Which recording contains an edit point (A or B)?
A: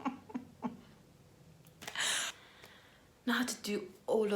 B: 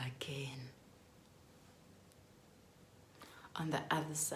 A